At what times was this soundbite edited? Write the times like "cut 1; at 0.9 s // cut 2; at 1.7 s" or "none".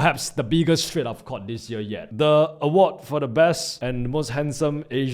cut 1; at 2.1 s // cut 2; at 3.7 s